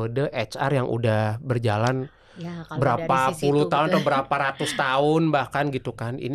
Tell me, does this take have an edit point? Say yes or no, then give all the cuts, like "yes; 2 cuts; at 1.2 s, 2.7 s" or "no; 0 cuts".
no; 0 cuts